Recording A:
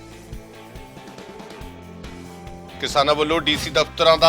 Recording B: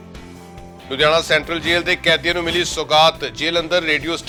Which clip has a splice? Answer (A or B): A